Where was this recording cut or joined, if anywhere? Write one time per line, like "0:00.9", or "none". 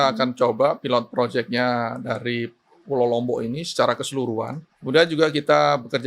0:04.6